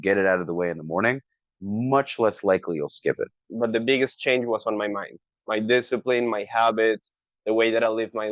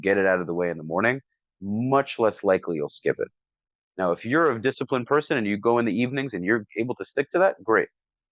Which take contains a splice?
first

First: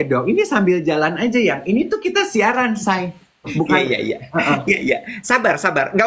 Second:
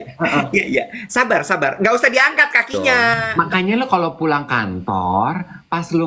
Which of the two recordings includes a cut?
second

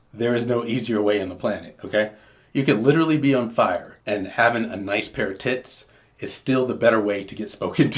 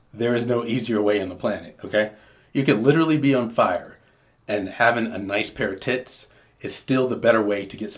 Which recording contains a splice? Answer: first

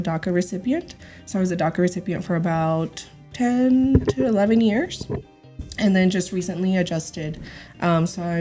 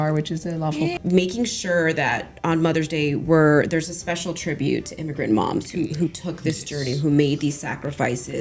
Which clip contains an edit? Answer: second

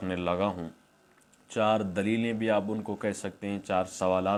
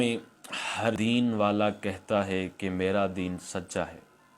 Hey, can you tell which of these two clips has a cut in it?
second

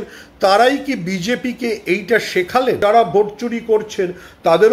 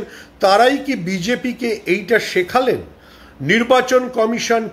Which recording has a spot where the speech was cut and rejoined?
first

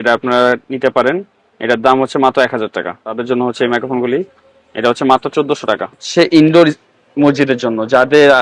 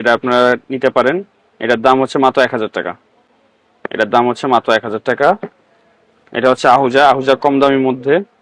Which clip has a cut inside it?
first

